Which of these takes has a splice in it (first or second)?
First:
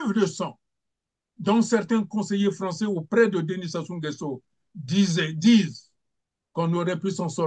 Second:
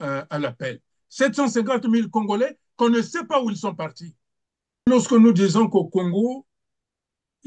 second